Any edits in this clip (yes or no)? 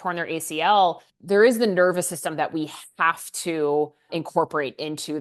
yes